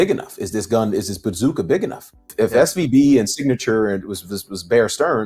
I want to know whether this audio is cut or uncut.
cut